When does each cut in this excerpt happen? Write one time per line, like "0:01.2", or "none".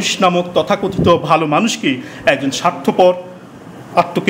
none